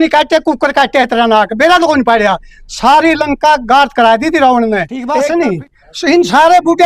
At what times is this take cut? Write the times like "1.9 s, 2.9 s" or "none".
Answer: 5.0 s